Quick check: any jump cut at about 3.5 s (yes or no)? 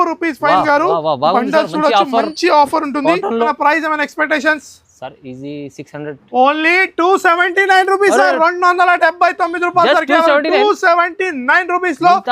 yes